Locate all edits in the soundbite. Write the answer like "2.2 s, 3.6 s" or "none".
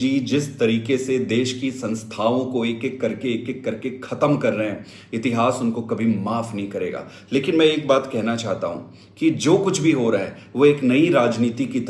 none